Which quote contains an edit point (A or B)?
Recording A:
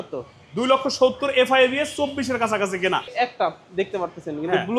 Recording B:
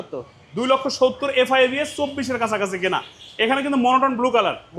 A